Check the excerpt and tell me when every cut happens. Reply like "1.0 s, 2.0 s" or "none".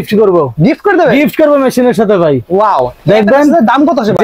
none